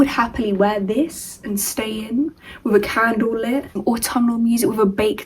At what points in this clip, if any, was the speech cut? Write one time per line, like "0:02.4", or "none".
0:03.7